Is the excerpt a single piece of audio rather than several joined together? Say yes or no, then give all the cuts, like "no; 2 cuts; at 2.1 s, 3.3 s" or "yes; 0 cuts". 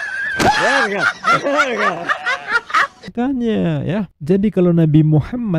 no; 1 cut; at 3.1 s